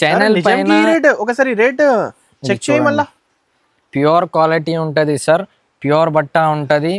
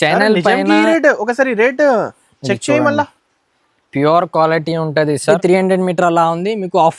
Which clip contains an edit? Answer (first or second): second